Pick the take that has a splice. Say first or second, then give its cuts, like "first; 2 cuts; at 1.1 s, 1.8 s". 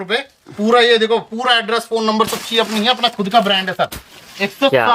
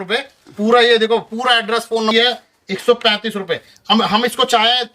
second; 1 cut; at 2.1 s